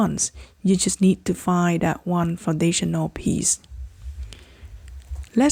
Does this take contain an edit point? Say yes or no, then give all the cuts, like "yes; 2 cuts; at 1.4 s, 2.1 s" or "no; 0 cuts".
no; 0 cuts